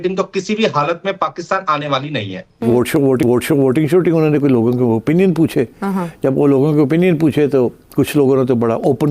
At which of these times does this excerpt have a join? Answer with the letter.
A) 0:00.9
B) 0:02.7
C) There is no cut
B